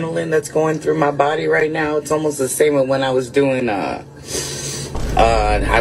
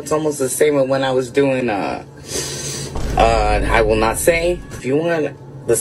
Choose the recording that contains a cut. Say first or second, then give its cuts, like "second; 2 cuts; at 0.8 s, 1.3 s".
second; 1 cut; at 4.8 s